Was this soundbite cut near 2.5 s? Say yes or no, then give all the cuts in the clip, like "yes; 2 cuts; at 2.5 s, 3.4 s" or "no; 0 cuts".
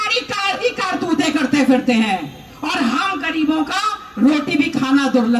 no; 0 cuts